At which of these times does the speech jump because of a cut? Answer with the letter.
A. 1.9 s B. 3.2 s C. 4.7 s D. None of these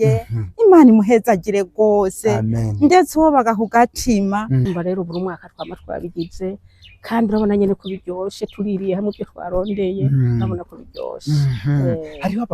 C